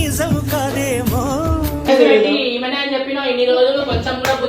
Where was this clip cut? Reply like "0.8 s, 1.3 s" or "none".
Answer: 1.9 s